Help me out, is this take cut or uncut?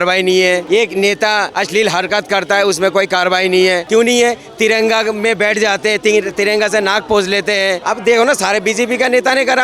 uncut